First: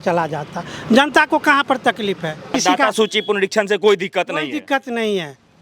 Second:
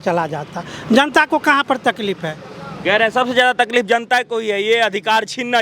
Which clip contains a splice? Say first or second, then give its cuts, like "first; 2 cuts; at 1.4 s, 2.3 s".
first; 1 cut; at 2.6 s